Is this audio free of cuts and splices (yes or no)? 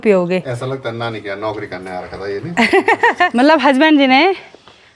no